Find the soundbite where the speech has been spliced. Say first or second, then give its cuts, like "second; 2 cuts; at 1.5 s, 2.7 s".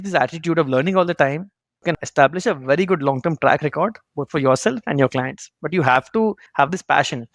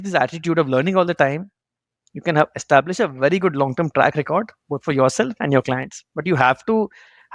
first; 2 cuts; at 2.0 s, 6.4 s